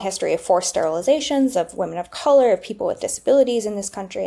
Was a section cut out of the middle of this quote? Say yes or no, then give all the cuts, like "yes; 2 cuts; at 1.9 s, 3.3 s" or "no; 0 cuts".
no; 0 cuts